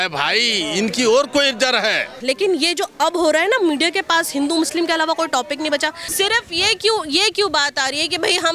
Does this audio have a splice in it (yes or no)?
yes